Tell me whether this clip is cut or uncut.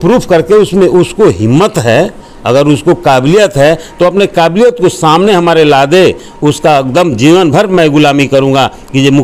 uncut